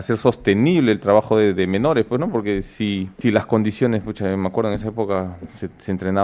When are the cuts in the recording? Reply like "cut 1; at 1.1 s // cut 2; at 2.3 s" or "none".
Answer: cut 1; at 3.1 s